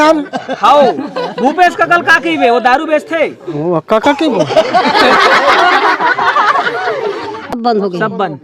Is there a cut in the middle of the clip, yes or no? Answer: yes